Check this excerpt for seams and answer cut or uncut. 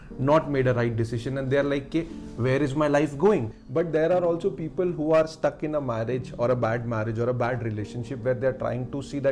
cut